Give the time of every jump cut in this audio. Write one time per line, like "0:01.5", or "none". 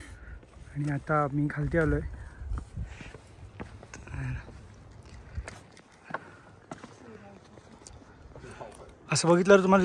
none